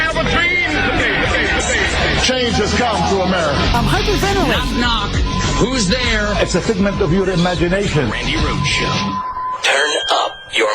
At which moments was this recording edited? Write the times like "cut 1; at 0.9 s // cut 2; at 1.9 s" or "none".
none